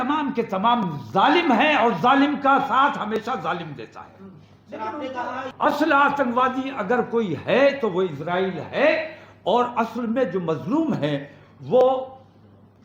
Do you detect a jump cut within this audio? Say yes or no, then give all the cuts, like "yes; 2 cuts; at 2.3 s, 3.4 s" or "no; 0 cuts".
yes; 1 cut; at 5.4 s